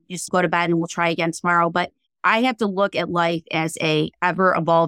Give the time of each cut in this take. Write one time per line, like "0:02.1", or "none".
none